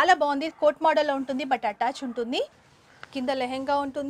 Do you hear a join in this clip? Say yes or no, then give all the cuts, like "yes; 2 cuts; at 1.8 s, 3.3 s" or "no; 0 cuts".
yes; 1 cut; at 2.5 s